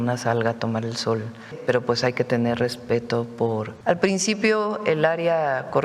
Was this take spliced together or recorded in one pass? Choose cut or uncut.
cut